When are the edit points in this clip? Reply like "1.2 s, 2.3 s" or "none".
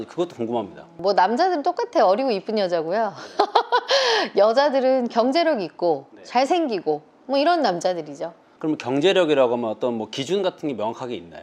none